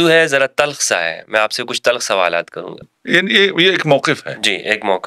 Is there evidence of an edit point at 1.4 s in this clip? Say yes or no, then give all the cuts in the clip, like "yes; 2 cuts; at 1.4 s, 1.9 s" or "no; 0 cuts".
no; 1 cut; at 2.9 s